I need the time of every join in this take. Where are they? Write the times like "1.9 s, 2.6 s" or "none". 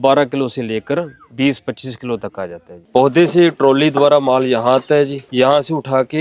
2.8 s